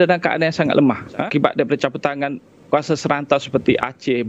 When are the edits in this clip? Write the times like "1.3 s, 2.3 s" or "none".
1.2 s

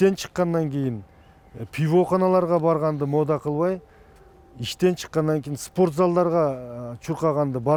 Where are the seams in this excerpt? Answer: none

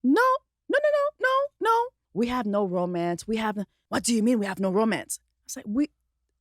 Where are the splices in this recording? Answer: 2.0 s, 3.7 s

